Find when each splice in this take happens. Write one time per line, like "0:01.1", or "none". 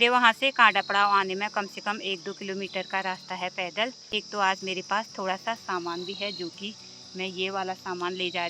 0:04.1